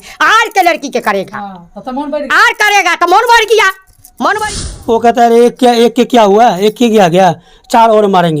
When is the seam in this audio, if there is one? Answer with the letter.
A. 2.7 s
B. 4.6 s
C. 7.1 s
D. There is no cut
B